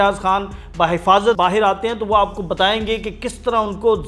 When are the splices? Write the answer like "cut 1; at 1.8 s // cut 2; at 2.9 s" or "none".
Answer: cut 1; at 1.4 s